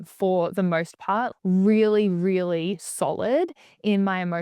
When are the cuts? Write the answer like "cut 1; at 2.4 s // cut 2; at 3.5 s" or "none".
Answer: cut 1; at 1.3 s